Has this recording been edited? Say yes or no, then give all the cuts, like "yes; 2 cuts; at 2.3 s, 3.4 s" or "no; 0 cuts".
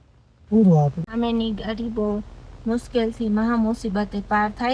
no; 0 cuts